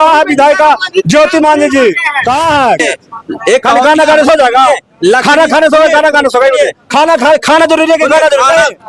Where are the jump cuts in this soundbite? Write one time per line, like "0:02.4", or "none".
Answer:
0:02.8

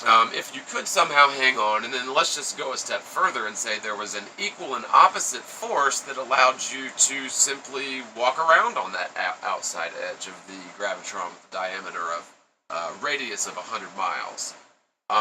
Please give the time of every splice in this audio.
0:01.2

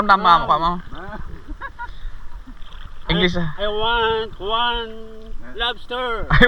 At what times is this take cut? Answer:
none

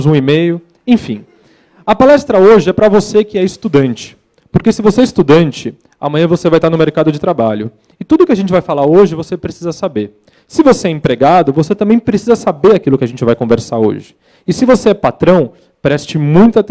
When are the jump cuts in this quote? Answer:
0:14.1

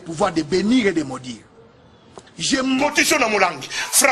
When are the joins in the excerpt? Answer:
0:02.8

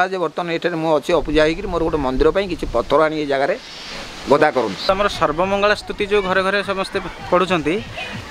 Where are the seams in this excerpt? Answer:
0:04.9

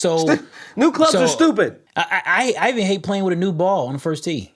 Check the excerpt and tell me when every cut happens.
0:01.9

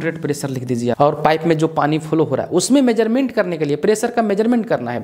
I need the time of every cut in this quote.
0:01.0

